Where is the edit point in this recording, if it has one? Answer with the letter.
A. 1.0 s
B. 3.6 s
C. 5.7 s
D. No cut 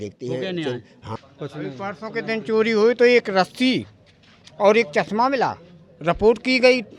A